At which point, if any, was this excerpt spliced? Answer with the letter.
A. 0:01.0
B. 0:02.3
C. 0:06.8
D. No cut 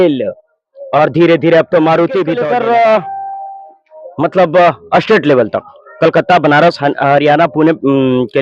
B